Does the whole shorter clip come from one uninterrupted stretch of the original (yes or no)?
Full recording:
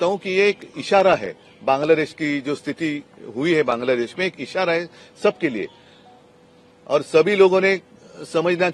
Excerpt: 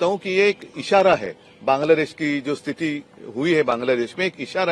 yes